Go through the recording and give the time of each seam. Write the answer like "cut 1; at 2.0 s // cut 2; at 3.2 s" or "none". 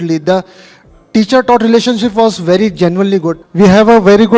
cut 1; at 3.4 s